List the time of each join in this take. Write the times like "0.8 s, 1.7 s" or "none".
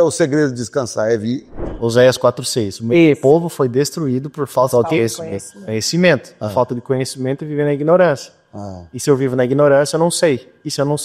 1.6 s